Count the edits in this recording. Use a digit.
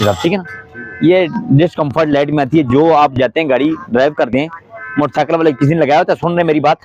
0